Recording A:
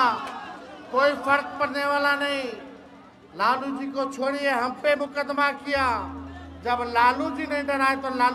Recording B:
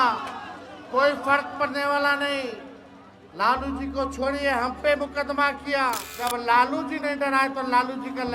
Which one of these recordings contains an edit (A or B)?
B